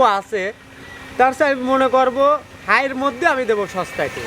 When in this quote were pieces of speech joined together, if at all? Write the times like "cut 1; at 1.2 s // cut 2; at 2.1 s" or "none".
none